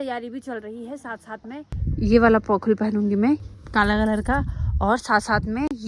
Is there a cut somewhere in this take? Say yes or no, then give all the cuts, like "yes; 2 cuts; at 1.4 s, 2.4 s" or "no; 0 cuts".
yes; 2 cuts; at 1.7 s, 3.6 s